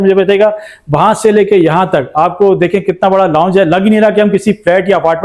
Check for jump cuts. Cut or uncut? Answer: uncut